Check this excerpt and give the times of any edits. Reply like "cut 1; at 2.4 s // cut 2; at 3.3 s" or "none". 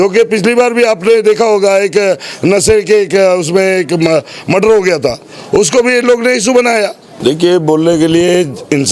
cut 1; at 7.1 s